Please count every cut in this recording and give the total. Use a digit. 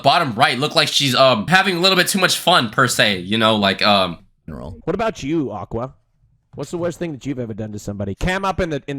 2